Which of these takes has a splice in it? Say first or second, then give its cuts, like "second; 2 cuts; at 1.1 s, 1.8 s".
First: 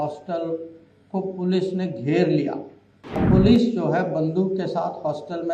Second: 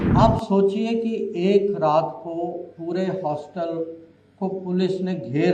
first; 1 cut; at 3.2 s